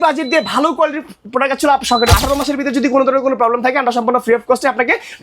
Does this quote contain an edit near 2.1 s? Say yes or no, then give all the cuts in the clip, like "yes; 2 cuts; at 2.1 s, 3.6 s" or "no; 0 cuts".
yes; 1 cut; at 2.1 s